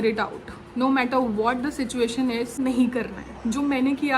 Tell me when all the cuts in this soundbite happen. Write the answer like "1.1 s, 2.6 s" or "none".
2.6 s